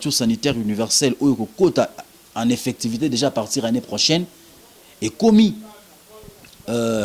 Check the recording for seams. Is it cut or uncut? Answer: uncut